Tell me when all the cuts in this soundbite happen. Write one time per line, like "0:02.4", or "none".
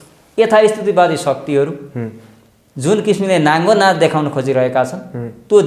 none